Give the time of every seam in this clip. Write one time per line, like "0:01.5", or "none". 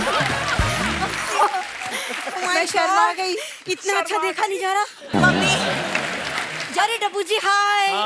0:06.6